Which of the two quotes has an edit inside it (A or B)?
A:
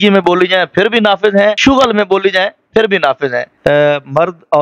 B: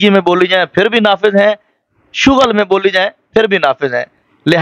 A